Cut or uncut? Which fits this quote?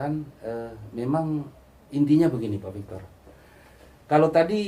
uncut